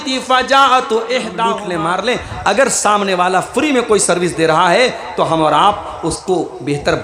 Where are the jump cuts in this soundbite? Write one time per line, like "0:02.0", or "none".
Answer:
0:01.6